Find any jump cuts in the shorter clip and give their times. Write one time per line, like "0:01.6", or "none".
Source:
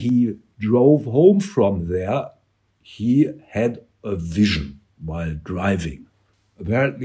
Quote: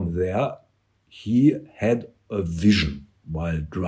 none